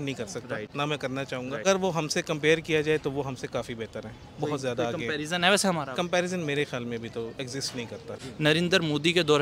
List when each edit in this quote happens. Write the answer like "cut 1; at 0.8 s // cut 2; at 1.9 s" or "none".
cut 1; at 1.6 s // cut 2; at 8.2 s